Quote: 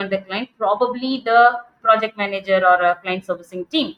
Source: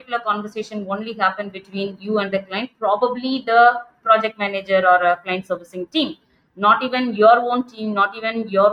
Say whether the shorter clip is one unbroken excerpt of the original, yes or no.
yes